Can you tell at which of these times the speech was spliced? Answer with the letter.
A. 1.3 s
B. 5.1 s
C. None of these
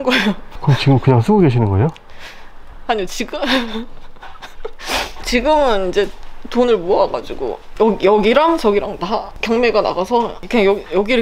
C